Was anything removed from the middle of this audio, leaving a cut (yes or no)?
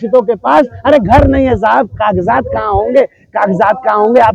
no